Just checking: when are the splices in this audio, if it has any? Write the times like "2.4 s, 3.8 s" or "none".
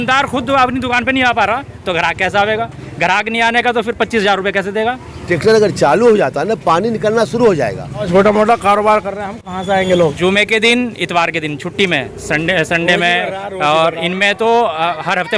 5.1 s, 8.1 s, 10.1 s